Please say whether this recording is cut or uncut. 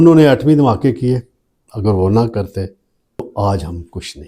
cut